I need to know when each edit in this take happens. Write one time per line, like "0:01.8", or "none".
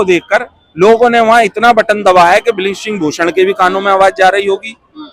none